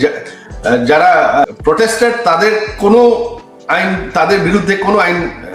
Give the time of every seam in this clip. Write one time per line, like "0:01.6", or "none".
0:01.4